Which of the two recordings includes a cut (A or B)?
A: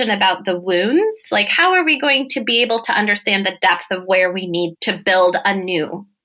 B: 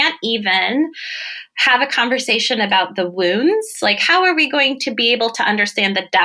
A